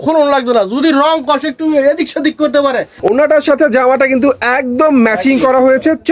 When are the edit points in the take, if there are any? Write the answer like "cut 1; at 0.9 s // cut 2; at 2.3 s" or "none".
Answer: cut 1; at 2.9 s